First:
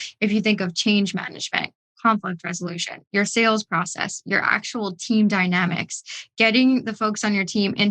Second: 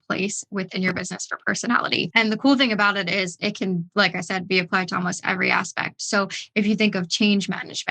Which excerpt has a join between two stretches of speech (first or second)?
second